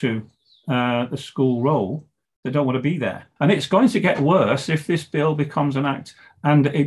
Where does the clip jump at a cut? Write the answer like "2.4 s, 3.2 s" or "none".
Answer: 3.3 s